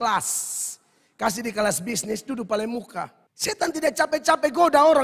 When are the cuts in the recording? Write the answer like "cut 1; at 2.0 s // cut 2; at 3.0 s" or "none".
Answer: cut 1; at 3.2 s